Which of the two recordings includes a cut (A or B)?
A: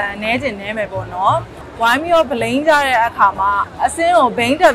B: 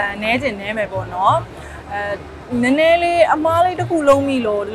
A